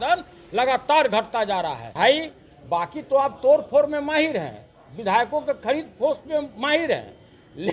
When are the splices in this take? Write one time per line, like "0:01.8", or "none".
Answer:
0:01.9